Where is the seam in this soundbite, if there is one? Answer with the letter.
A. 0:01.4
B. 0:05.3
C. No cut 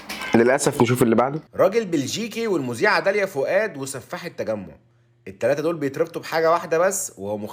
C